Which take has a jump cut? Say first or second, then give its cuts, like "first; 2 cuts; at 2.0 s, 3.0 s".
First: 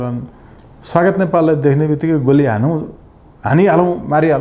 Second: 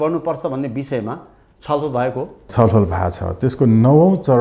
second; 1 cut; at 2.5 s